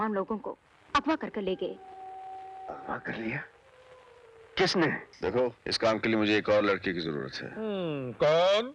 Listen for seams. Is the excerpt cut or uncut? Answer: cut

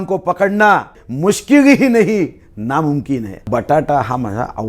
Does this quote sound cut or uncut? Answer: cut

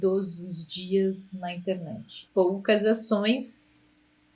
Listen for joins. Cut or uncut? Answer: cut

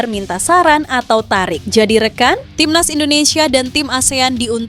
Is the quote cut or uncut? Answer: cut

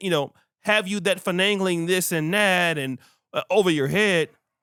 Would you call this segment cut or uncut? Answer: uncut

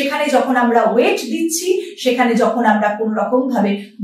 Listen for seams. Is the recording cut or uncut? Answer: uncut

